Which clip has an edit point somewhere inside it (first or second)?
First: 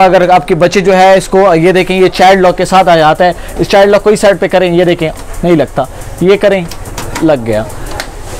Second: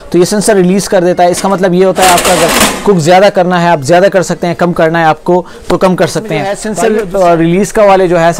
second